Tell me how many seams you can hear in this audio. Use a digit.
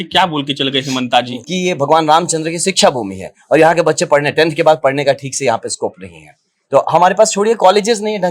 1